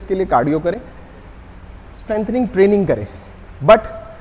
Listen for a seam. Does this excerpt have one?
no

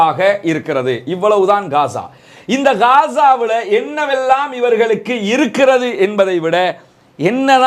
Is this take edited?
no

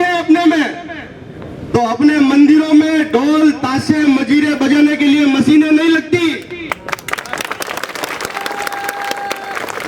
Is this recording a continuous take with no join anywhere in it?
yes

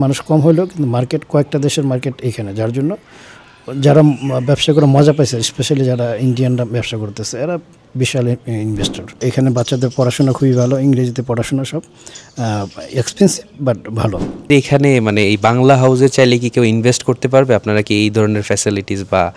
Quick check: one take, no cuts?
no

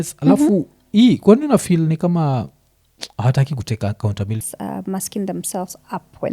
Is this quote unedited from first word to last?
no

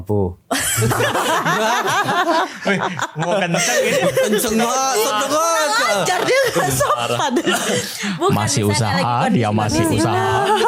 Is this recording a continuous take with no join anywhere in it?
yes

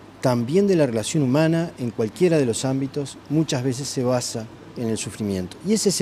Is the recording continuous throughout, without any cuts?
yes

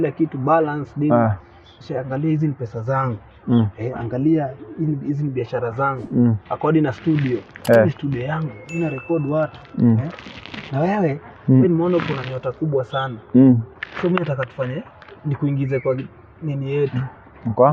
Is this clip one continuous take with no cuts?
yes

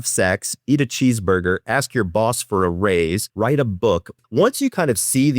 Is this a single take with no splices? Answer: no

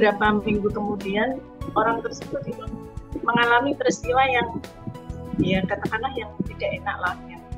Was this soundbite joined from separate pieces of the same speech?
no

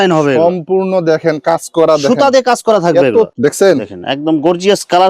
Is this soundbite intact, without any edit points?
no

